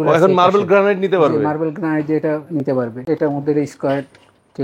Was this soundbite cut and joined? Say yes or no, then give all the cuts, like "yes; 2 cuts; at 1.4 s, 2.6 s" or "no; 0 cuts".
yes; 1 cut; at 3.0 s